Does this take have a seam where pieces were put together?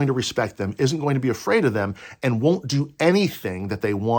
no; 0 cuts

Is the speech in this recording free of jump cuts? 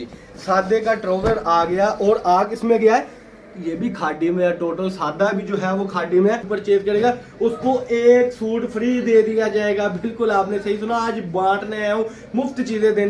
no; 1 cut; at 6.5 s

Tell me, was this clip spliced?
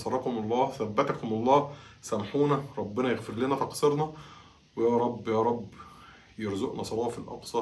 no; 0 cuts

